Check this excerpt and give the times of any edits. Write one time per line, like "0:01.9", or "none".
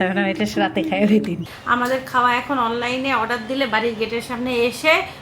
0:01.5